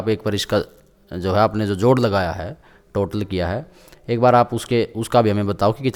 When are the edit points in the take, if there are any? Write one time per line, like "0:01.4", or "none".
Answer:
none

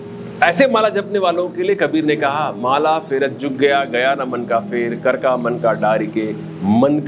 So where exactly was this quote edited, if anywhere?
none

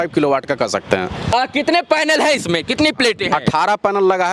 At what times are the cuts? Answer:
0:01.3

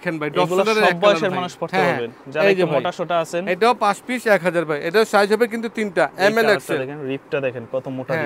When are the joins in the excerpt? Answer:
none

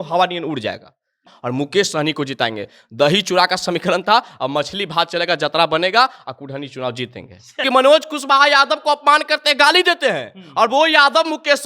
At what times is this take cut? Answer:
0:01.3
0:07.6

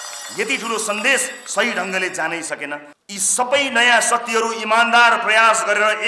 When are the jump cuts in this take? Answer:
0:02.9

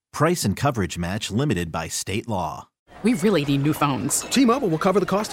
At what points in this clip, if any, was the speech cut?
none

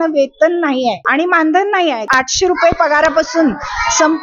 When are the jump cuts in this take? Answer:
0:01.0
0:02.1

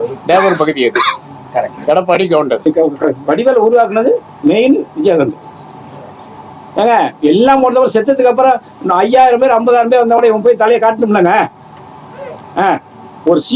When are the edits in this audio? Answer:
0:02.7

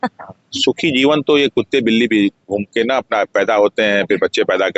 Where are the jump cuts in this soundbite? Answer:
none

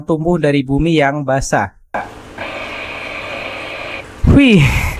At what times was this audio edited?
0:04.1

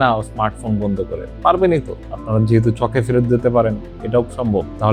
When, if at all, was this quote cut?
none

